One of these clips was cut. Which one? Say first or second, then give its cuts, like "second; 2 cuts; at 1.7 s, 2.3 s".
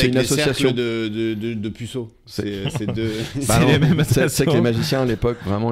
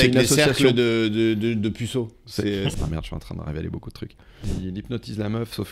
second; 2 cuts; at 2.7 s, 4.5 s